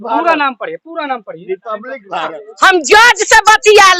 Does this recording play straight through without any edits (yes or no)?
no